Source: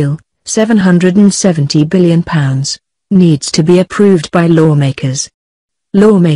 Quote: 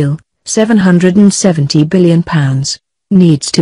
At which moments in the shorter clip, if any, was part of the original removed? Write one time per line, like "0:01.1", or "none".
none